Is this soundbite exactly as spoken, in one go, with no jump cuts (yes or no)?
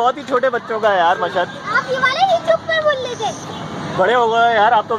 yes